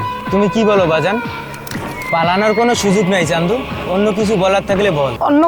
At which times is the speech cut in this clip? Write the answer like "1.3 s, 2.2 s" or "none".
none